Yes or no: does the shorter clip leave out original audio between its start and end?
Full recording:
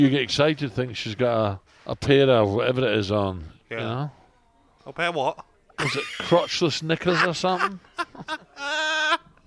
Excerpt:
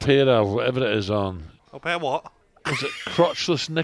yes